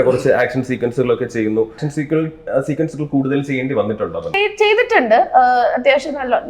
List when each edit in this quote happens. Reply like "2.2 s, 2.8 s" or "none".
1.8 s, 4.4 s